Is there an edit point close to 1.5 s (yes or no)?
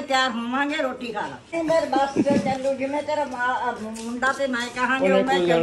yes